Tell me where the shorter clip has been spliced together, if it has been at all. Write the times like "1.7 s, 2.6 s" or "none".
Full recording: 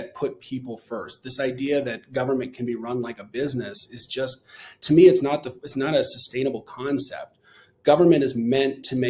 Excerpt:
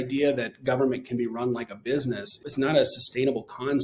2.4 s

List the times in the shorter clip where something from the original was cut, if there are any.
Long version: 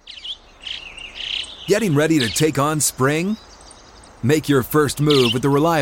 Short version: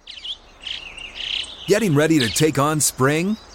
none

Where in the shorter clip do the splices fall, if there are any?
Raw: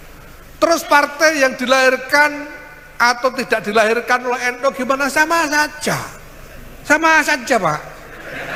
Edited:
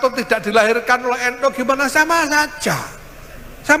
none

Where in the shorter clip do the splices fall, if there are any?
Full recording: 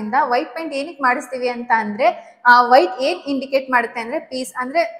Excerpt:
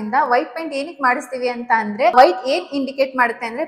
2.1 s

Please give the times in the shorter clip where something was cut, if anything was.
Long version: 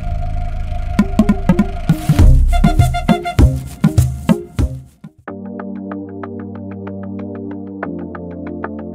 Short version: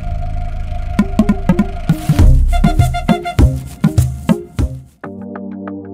4.9 s

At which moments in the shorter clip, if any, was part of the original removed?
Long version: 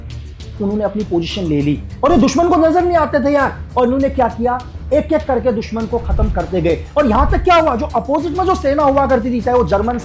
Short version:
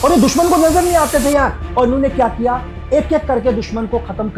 none

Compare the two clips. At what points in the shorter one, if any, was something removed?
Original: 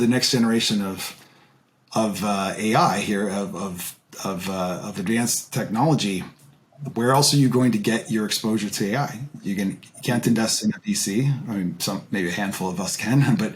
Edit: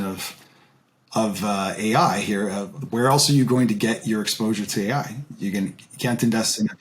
2.7 s

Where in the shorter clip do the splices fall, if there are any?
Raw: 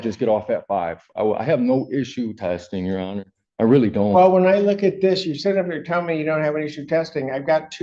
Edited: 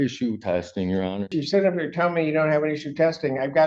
1.4 s

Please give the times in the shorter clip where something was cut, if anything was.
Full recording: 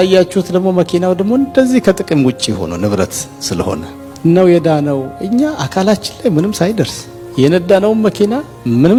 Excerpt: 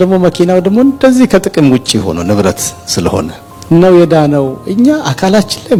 none

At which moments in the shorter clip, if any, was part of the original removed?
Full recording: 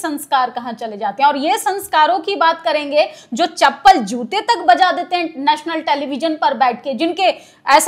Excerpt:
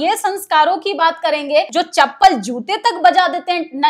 1.7 s

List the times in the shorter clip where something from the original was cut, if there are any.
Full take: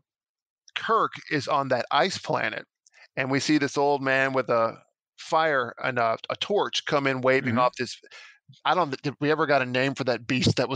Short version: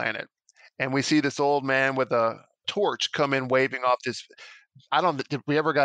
2.6 s

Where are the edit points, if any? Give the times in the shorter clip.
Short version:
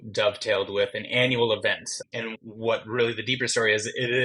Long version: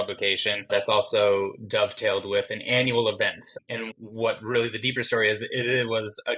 none

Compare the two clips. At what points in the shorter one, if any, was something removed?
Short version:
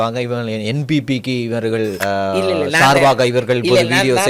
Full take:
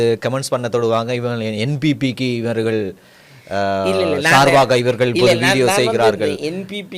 2.0 s

